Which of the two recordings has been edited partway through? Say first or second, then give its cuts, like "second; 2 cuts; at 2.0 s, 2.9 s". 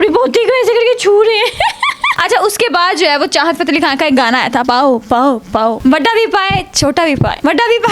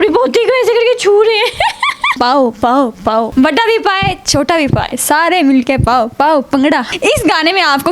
second; 2 cuts; at 2.2 s, 4.9 s